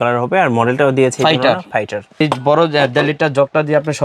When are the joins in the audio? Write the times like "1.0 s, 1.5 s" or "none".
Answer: 2.2 s